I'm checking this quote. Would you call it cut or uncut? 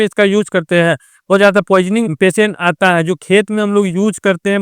cut